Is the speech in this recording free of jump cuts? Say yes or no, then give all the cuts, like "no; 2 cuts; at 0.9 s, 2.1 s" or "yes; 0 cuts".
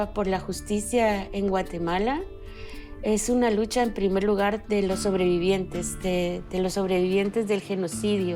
yes; 0 cuts